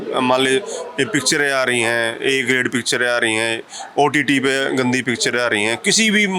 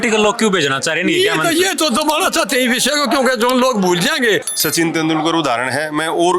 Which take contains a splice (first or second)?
second